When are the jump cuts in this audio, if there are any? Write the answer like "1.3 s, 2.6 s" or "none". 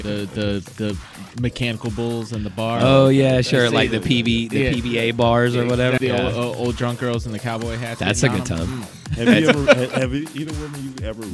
6.0 s, 9.0 s

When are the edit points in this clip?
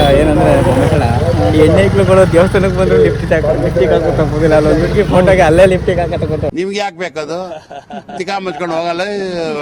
6.5 s

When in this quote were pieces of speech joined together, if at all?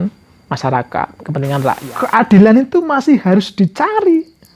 1.8 s

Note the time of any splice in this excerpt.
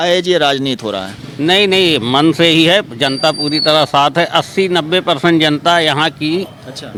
none

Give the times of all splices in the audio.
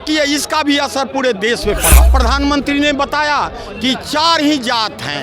2.1 s

